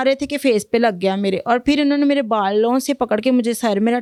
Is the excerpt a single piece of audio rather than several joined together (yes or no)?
yes